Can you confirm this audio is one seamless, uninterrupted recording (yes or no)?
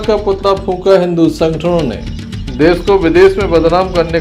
yes